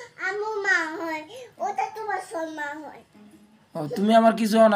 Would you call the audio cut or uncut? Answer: uncut